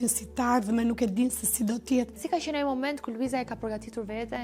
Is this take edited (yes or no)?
yes